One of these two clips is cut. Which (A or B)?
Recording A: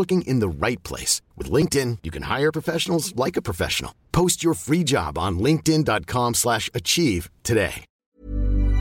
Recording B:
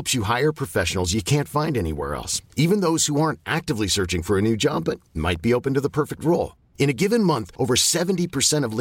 A